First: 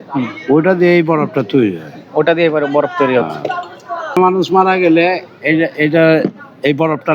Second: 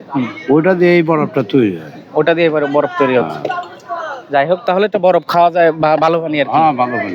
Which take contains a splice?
first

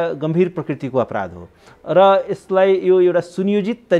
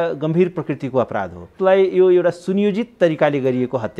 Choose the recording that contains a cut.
second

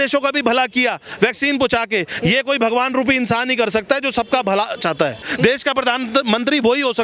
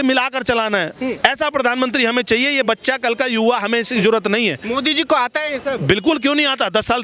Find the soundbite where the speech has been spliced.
first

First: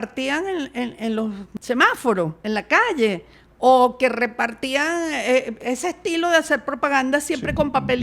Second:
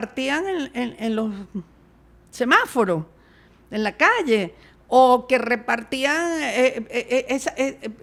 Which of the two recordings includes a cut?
first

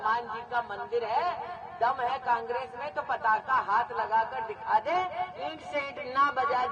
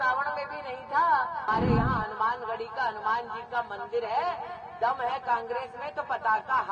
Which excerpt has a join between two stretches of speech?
second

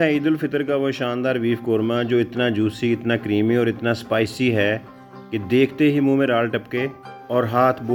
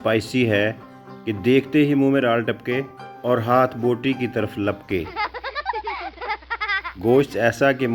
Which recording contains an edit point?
second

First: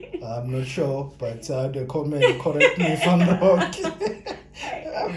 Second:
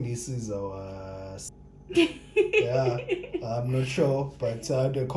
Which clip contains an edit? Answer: second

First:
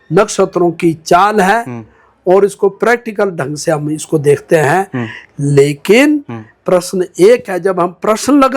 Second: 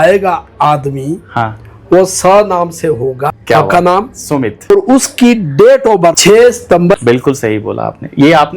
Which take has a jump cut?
second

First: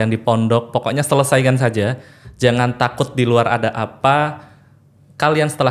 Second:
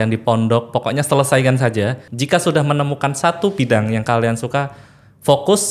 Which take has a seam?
second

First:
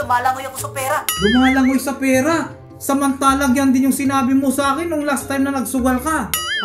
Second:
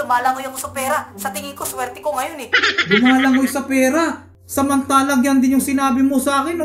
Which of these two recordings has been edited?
first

